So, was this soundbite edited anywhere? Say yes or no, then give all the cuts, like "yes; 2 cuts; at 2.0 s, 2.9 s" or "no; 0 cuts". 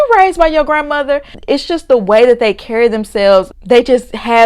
yes; 1 cut; at 1.3 s